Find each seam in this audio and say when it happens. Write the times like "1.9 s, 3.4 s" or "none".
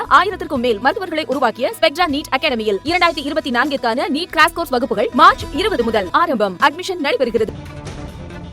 7.6 s

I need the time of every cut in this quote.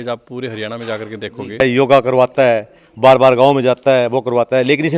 1.6 s

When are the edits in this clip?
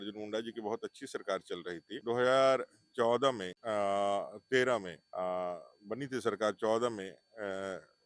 1.9 s, 3.5 s, 5.0 s

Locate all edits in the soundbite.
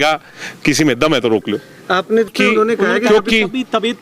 2.3 s

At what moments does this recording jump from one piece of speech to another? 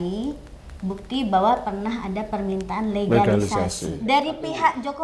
3.8 s

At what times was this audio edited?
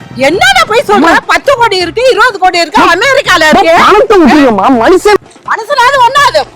5.2 s

